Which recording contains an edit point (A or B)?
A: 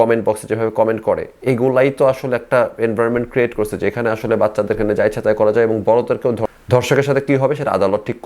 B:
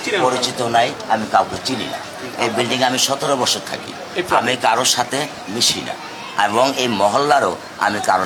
A